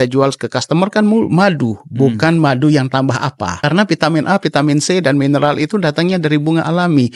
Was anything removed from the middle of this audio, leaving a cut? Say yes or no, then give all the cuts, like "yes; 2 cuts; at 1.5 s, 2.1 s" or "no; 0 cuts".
yes; 1 cut; at 3.6 s